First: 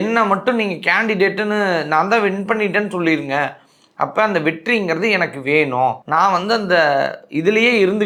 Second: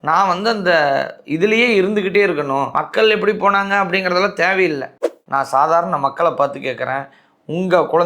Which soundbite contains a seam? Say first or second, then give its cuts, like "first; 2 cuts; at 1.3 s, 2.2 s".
second; 1 cut; at 5.0 s